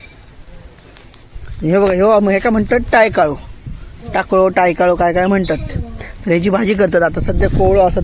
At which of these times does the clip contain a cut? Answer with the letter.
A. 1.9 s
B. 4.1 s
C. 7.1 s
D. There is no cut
D